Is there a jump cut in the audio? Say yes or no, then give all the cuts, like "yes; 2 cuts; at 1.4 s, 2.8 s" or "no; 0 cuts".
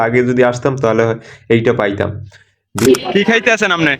yes; 1 cut; at 2.8 s